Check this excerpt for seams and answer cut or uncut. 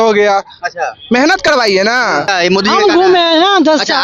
cut